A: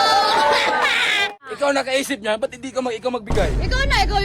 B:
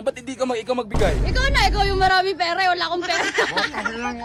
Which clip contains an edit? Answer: A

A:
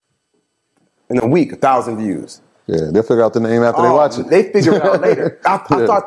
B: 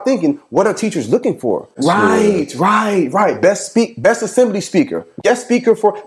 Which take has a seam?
B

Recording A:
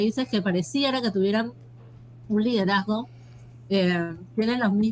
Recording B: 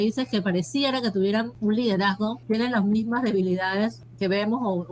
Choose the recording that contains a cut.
B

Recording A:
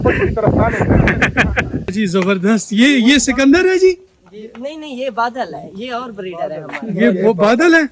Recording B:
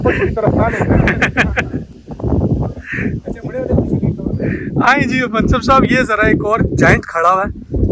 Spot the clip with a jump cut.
A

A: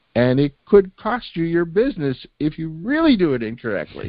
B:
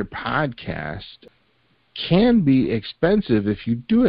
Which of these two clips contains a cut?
B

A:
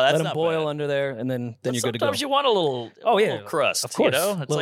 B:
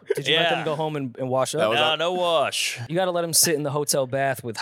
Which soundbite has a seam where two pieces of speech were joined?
B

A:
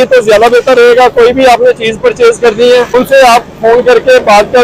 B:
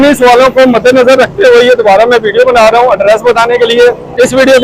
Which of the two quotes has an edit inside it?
A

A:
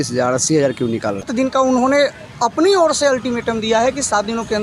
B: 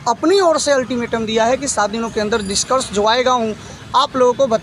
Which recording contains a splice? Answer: A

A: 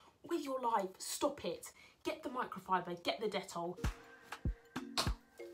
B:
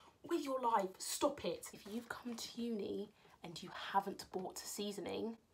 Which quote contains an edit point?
B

